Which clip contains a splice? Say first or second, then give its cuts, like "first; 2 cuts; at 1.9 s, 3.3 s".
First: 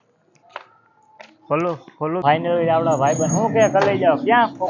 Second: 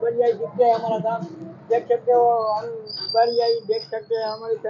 first; 1 cut; at 2.2 s